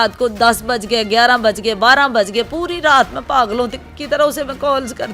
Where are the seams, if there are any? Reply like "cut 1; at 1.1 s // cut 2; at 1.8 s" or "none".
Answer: none

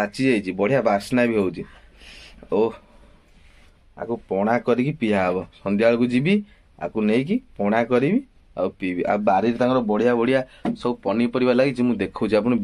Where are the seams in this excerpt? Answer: none

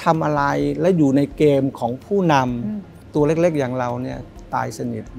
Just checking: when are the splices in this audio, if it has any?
none

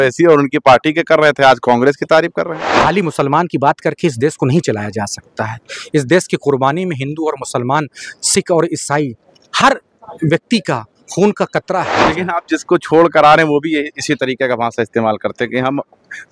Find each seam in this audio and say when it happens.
cut 1; at 2.6 s // cut 2; at 12.1 s

